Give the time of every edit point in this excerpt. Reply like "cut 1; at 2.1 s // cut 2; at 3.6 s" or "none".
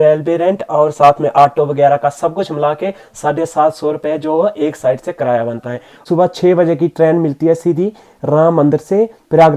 cut 1; at 5.9 s